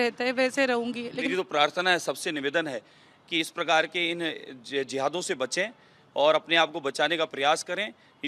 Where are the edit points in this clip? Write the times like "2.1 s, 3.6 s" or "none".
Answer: 1.3 s